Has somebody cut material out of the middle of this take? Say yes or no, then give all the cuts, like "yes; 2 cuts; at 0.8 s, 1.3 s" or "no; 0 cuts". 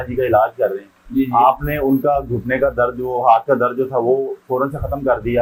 no; 0 cuts